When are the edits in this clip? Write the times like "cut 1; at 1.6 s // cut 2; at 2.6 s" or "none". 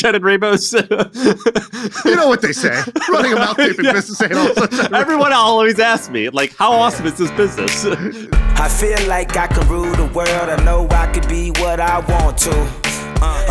cut 1; at 8.2 s

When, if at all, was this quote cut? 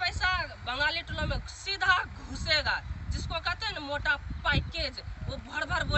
none

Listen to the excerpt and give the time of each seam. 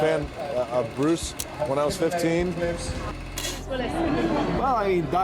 cut 1; at 3.2 s

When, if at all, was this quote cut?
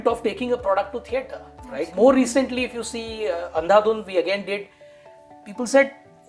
none

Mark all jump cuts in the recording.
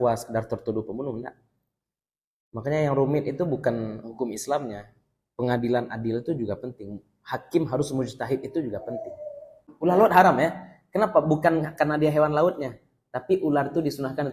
cut 1; at 9.6 s

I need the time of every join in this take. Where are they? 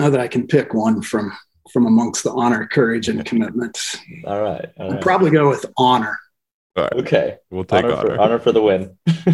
none

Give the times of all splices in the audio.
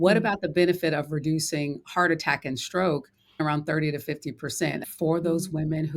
cut 1; at 3.4 s // cut 2; at 4.9 s

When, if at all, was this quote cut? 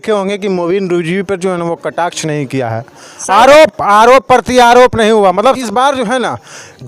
cut 1; at 5.6 s

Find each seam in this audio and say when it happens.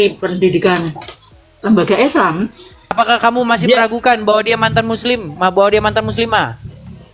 cut 1; at 2.9 s

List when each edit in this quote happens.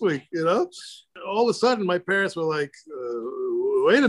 cut 1; at 1.2 s

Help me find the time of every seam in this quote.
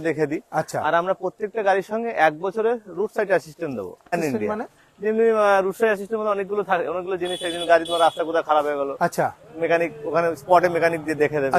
cut 1; at 4.2 s

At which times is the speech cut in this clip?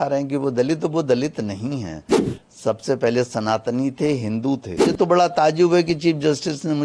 cut 1; at 4.9 s

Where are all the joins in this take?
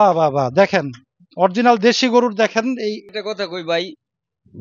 cut 1; at 3.0 s

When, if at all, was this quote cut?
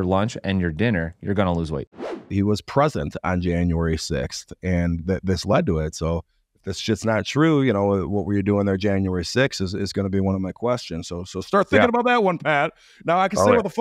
cut 1; at 2.1 s

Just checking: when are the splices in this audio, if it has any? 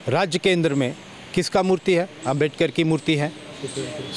none

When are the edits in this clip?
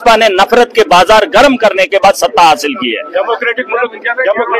none

